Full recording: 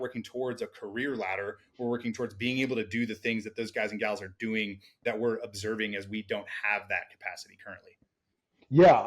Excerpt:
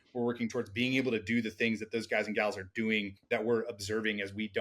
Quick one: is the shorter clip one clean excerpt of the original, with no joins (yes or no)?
no